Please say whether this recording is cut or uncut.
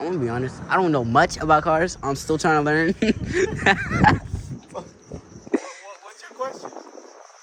uncut